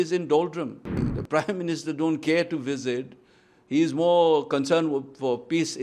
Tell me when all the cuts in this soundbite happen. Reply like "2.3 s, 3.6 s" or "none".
1.0 s